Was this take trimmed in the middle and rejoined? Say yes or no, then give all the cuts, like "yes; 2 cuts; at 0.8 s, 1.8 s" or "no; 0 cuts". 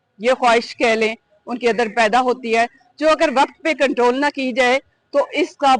no; 0 cuts